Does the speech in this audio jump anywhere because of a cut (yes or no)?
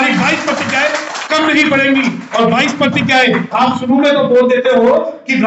no